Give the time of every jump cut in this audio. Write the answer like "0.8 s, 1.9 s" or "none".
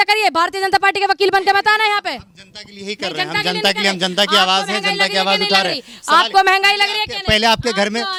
none